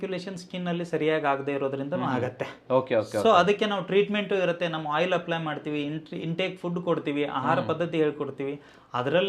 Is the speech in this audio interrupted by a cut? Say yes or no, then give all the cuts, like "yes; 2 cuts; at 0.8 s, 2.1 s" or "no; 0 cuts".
no; 0 cuts